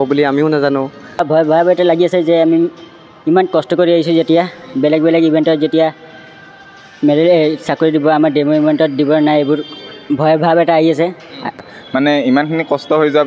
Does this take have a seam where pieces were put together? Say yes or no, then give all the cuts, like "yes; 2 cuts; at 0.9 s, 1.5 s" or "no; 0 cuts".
yes; 2 cuts; at 1.0 s, 11.7 s